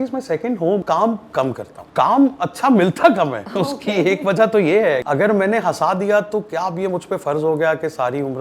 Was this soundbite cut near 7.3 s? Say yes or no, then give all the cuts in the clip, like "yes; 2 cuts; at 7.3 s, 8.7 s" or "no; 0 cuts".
no; 4 cuts; at 0.8 s, 1.7 s, 3.4 s, 5.0 s